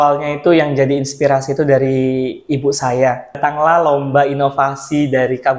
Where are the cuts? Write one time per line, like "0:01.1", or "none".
0:03.4